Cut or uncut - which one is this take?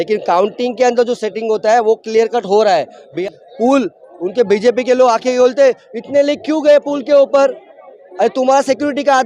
cut